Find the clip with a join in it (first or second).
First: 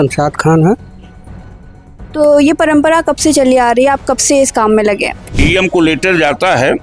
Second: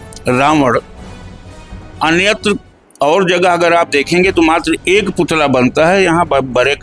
first